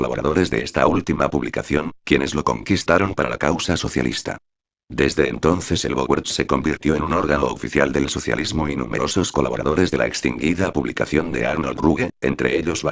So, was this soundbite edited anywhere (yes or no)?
yes